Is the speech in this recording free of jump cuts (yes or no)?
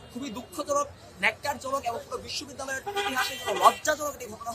yes